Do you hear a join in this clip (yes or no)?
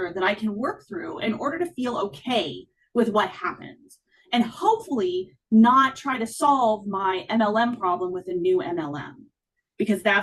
no